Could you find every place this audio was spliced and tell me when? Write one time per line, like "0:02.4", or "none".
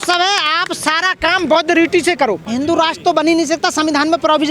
0:02.4